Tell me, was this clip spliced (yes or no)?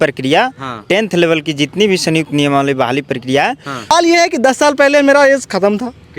yes